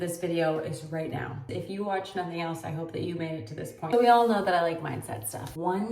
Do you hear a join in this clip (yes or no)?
yes